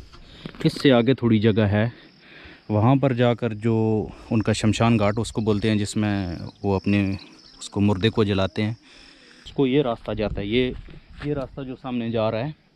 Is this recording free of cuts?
no; 1 cut; at 9.4 s

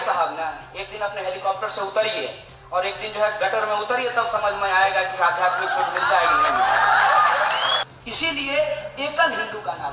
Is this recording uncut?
no; 1 cut; at 7.8 s

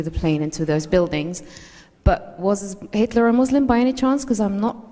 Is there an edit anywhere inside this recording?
no; 0 cuts

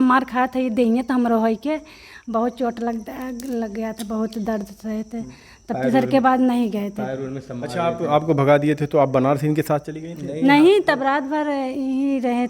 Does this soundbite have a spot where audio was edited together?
no; 0 cuts

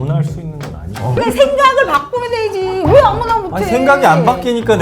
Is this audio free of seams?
no; 1 cut; at 1.1 s

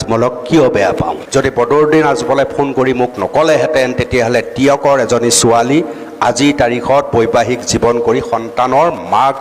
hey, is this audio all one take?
no; 1 cut; at 1.2 s

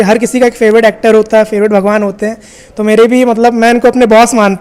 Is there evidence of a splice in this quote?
no; 0 cuts

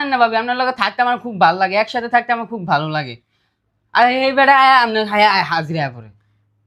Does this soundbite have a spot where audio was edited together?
no; 0 cuts

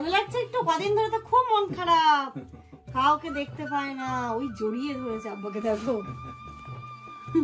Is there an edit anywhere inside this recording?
no; 0 cuts

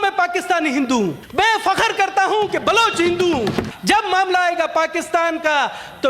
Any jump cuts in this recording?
yes; 2 cuts; at 1.2 s, 3.7 s

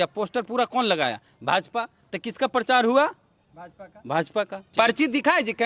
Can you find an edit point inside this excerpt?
yes; 1 cut; at 4.7 s

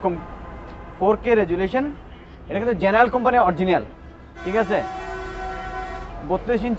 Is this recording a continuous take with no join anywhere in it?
yes; 0 cuts

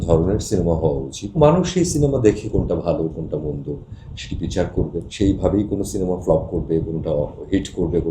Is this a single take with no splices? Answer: no; 2 cuts; at 1.4 s, 5.1 s

